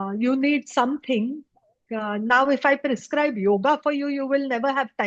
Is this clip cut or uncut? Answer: uncut